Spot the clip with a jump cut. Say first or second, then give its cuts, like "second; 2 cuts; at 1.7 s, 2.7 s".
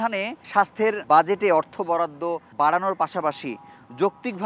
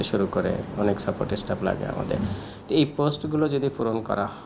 first; 2 cuts; at 0.7 s, 2.4 s